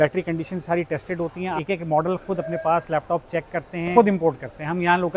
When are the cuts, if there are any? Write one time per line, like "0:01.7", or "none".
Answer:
0:01.5
0:03.9